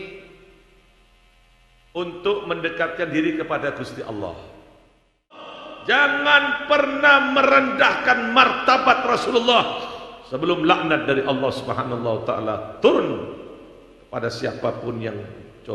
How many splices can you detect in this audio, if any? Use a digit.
1